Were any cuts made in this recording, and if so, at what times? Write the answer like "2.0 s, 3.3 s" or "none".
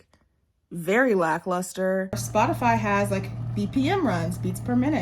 2.2 s